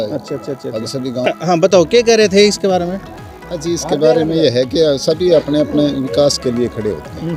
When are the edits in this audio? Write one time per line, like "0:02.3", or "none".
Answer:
none